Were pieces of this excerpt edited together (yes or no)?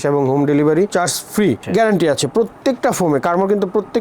yes